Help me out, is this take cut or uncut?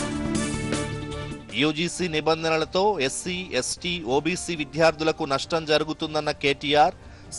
cut